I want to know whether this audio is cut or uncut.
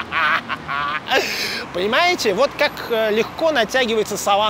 uncut